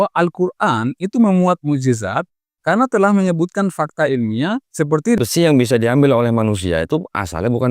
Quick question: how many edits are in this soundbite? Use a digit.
1